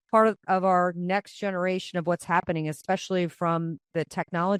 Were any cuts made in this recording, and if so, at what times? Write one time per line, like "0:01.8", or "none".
none